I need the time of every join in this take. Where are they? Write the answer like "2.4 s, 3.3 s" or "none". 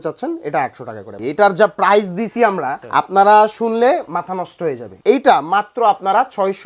1.0 s, 2.8 s, 5.0 s